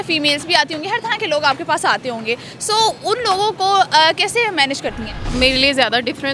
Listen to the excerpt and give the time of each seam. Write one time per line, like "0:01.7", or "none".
none